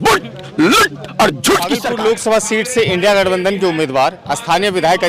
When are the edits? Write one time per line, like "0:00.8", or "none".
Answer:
0:01.9